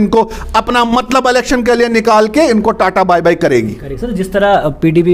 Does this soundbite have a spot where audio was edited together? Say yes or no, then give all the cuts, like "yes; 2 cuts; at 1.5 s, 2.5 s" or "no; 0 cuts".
no; 0 cuts